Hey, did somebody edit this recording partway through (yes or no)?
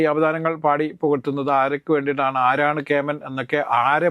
no